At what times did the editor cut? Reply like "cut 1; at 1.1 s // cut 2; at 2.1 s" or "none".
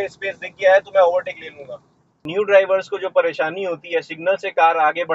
cut 1; at 2.2 s

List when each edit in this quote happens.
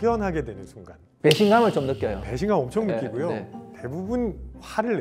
none

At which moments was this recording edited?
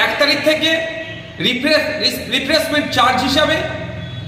none

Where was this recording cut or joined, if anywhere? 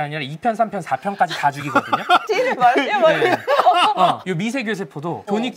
none

